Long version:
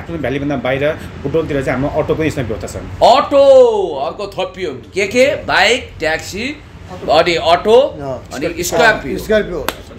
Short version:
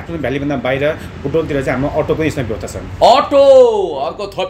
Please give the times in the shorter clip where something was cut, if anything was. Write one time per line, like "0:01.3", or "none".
none